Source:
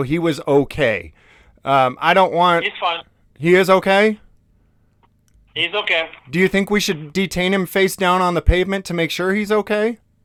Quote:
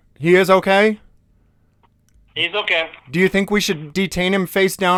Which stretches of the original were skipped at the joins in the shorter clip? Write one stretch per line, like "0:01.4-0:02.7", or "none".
none